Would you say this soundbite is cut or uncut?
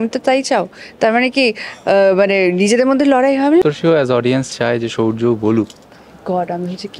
cut